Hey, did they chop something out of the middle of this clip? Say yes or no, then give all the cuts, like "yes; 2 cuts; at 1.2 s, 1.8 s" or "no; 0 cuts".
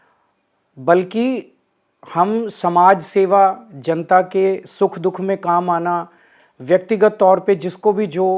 no; 0 cuts